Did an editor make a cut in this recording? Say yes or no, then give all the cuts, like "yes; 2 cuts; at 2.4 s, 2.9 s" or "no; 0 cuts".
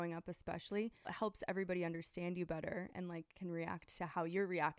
yes; 1 cut; at 1.1 s